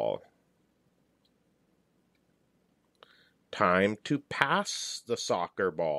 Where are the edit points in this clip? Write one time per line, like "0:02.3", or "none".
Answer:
0:01.7